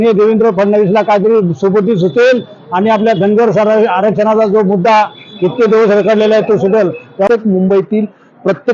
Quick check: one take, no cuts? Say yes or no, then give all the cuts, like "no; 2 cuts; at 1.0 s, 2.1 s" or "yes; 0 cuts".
no; 1 cut; at 7.3 s